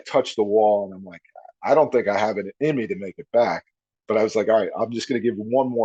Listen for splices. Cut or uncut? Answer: uncut